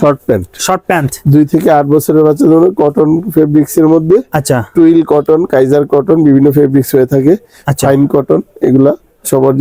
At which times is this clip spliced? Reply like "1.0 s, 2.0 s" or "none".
none